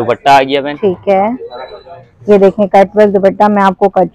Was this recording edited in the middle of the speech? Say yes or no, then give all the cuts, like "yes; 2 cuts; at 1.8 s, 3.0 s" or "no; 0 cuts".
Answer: no; 0 cuts